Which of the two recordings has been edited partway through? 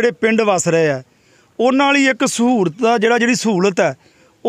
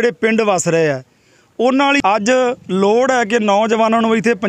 second; 1 cut; at 2.0 s

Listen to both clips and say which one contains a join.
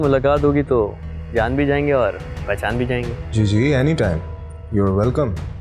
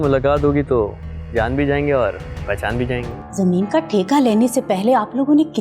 second; 1 cut; at 3.2 s

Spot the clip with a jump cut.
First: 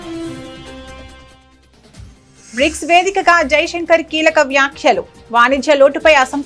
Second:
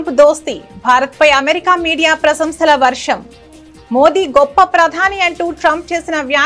first; 1 cut; at 2.5 s

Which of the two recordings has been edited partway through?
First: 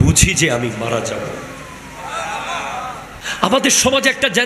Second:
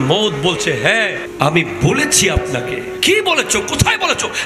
first; 1 cut; at 3.2 s

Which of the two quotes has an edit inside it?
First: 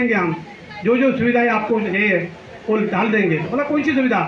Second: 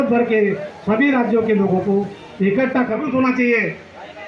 second; 1 cut; at 3.0 s

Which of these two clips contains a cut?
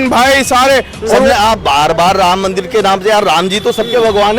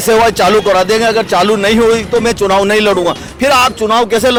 first; 1 cut; at 1.3 s

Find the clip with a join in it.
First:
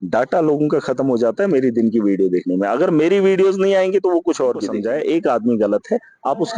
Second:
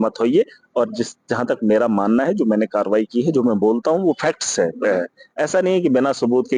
first; 1 cut; at 4.7 s

